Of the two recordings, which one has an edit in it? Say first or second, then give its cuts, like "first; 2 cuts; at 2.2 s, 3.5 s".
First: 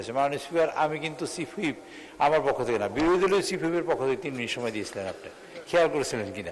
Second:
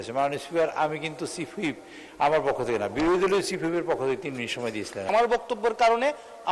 second; 1 cut; at 5.1 s